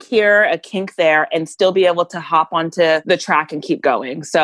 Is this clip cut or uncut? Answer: cut